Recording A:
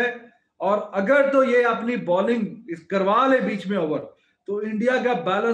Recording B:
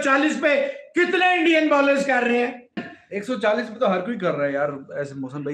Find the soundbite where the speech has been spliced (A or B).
B